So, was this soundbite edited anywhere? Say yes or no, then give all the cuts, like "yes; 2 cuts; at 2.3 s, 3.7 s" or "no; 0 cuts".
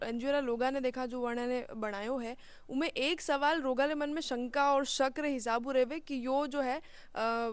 no; 0 cuts